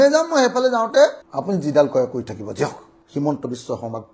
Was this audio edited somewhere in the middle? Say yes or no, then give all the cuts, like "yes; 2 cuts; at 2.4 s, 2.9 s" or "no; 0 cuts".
yes; 2 cuts; at 1.2 s, 2.9 s